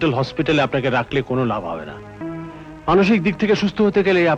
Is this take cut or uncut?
cut